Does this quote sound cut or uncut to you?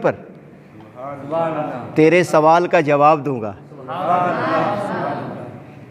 uncut